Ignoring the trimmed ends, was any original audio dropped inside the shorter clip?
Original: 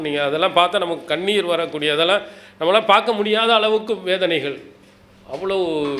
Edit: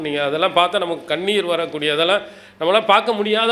no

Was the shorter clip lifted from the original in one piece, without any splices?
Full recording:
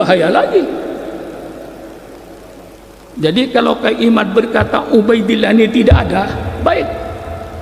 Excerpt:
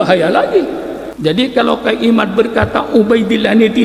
no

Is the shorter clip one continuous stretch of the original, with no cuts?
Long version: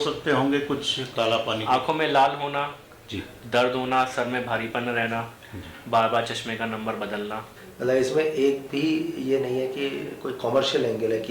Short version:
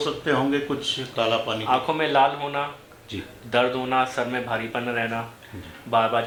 yes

